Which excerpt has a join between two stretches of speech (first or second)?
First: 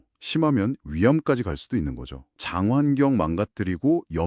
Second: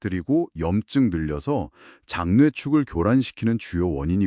first